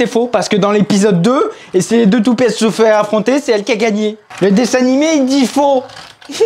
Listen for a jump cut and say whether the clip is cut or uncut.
uncut